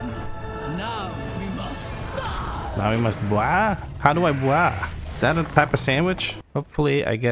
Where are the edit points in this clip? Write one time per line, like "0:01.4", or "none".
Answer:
0:06.3